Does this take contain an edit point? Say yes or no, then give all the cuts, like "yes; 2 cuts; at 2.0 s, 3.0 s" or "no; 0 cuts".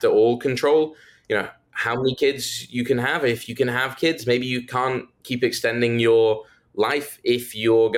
no; 0 cuts